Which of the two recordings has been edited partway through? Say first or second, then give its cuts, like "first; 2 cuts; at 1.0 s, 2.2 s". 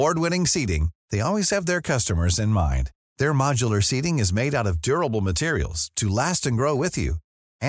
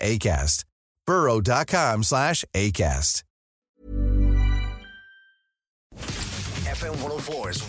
second; 1 cut; at 5.9 s